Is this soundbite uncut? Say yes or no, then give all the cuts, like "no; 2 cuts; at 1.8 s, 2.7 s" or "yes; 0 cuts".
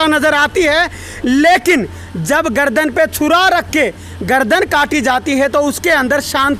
yes; 0 cuts